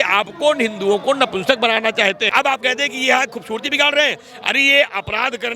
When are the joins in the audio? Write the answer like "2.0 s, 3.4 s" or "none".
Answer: 2.3 s